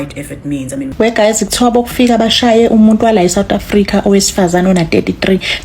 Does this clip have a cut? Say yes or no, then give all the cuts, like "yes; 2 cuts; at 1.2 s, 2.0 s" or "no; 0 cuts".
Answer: yes; 1 cut; at 0.9 s